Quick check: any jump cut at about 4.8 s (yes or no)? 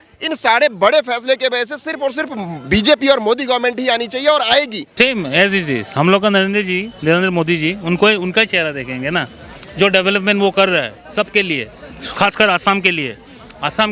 yes